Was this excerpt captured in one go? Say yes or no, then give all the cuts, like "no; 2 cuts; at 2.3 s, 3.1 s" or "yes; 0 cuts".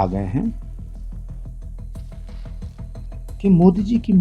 no; 2 cuts; at 1.2 s, 3.4 s